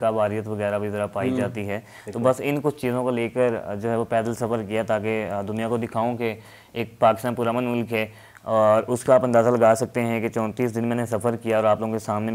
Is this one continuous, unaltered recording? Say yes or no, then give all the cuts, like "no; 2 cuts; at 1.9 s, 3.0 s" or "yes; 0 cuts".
yes; 0 cuts